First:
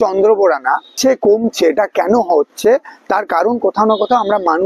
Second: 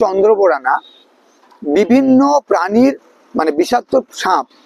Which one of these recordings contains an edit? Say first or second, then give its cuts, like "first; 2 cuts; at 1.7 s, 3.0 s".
first; 1 cut; at 0.9 s